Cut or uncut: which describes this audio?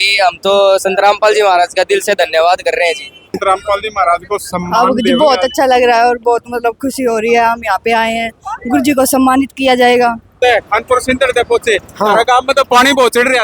cut